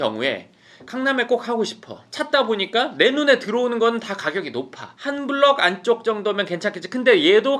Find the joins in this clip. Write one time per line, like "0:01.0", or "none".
0:05.1